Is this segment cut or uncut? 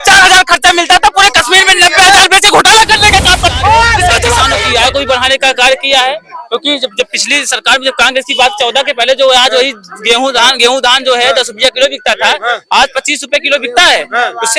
cut